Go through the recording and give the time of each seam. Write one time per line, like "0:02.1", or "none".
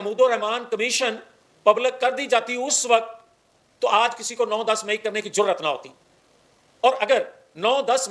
none